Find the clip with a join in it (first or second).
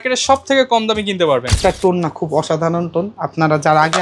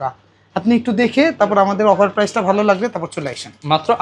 first